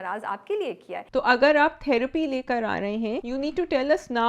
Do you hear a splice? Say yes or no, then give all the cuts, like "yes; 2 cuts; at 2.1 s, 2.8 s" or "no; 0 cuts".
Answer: yes; 2 cuts; at 1.0 s, 3.2 s